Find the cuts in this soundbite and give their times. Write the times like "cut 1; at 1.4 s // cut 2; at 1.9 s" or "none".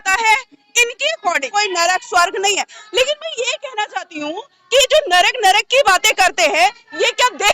cut 1; at 1.5 s